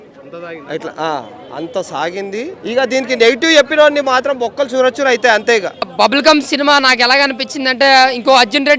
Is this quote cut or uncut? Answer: cut